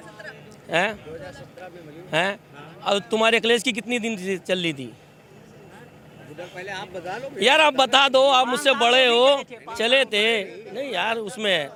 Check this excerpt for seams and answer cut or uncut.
uncut